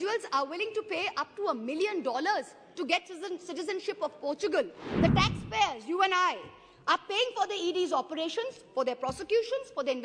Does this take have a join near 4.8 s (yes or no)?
yes